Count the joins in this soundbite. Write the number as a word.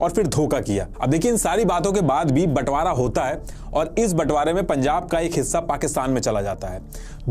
zero